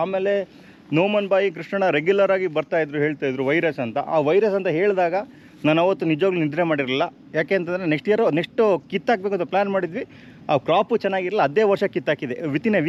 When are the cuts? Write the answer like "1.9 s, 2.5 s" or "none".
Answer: none